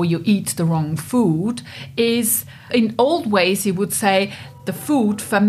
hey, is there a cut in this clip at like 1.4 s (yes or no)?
no